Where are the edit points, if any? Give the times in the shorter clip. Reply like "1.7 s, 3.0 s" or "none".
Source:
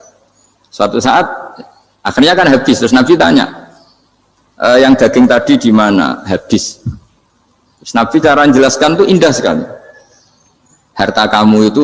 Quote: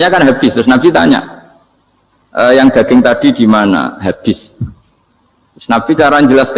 none